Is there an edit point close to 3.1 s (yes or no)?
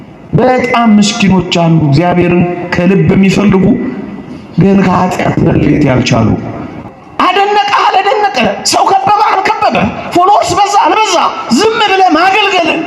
no